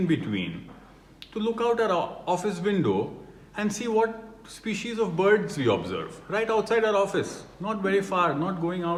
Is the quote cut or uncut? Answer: uncut